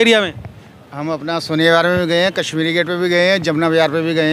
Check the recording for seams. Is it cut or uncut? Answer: uncut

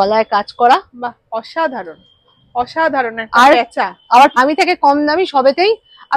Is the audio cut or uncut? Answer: cut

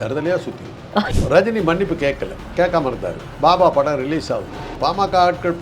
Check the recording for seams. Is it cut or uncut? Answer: cut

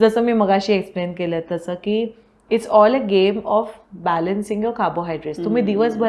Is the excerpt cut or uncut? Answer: uncut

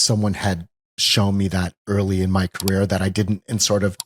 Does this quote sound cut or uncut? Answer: uncut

